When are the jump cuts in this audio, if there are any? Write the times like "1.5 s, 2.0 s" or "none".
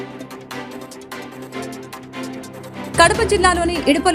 1.1 s, 2.9 s